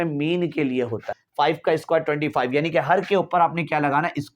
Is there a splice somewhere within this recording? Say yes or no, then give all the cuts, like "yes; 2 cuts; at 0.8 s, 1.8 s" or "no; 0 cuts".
yes; 1 cut; at 1.2 s